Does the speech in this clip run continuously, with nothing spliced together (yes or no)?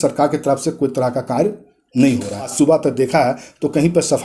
no